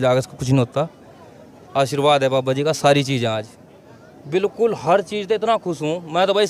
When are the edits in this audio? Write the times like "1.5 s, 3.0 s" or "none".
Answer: none